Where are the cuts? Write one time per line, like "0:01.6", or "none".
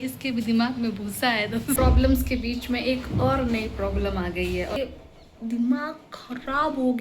0:01.8
0:04.9